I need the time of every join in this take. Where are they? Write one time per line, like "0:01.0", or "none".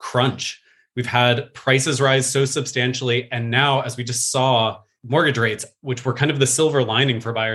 0:04.9